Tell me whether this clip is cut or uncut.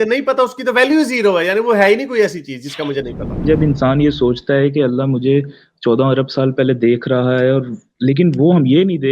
cut